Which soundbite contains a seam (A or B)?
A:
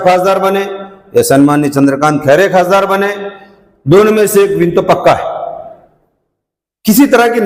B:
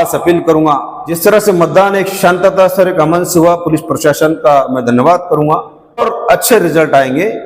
B